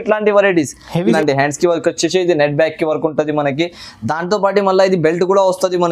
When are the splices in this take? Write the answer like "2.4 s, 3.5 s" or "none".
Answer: 1.2 s

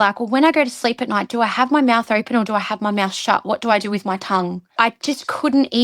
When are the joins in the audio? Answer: 4.8 s

